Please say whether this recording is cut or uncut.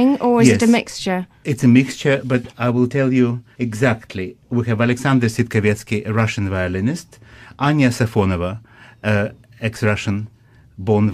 uncut